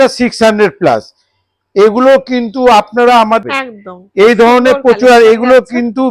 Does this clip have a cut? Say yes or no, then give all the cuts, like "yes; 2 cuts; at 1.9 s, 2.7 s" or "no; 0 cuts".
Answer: yes; 1 cut; at 3.4 s